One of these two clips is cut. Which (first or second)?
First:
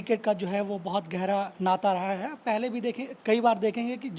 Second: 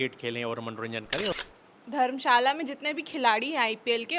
second